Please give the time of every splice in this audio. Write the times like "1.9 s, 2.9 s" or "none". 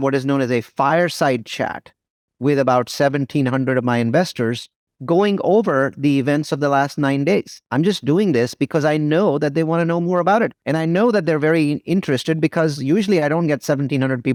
none